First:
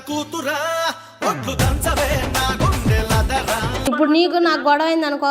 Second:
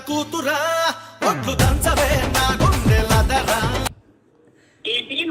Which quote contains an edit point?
first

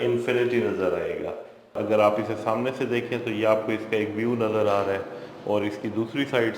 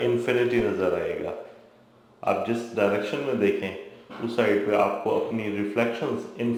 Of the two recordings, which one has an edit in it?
first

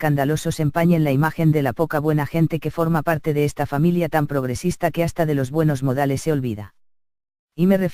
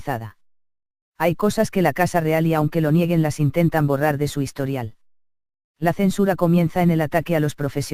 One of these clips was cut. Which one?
first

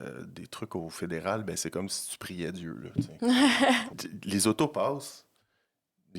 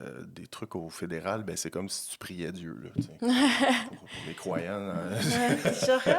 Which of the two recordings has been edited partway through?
first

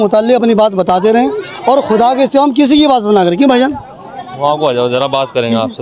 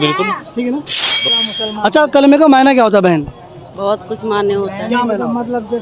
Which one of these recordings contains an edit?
second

